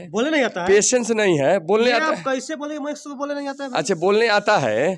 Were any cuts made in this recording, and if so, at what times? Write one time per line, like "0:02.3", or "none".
none